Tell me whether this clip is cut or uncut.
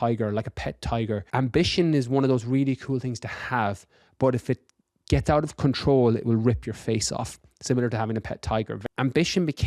cut